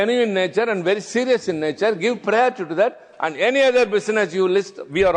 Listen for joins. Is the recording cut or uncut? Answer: uncut